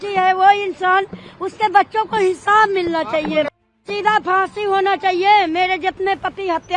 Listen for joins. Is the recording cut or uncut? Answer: cut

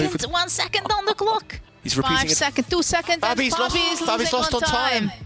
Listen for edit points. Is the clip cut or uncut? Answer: cut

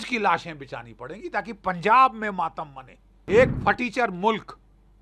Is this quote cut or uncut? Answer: cut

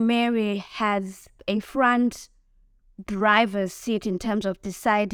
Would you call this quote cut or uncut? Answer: uncut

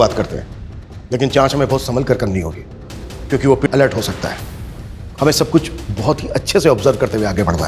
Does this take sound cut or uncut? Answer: cut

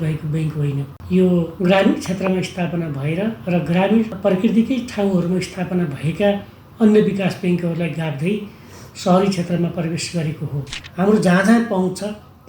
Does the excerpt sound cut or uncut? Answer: cut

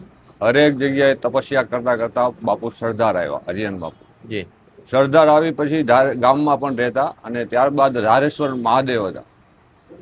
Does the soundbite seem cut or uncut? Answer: uncut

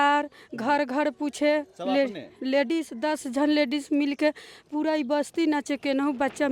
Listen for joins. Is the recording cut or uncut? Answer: uncut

